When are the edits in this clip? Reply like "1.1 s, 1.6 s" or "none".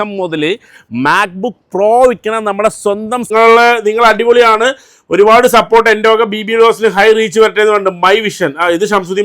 3.3 s

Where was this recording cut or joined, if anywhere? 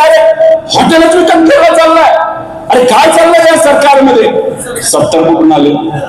4.7 s

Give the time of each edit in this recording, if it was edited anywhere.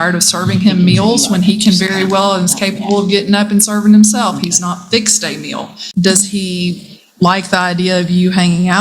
5.8 s

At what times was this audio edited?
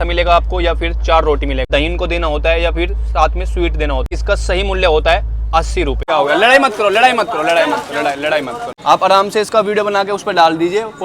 1.6 s, 4.0 s, 6.0 s, 8.7 s

